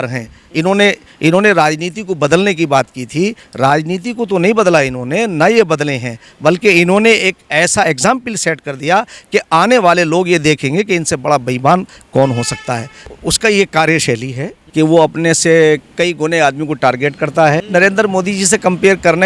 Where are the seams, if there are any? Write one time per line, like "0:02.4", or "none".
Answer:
0:13.1
0:14.6
0:17.6